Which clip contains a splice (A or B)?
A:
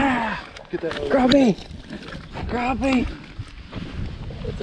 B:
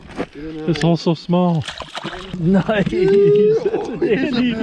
B